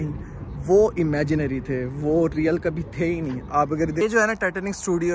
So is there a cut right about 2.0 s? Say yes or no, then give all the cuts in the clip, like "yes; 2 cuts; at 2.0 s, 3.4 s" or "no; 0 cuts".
no; 1 cut; at 4.0 s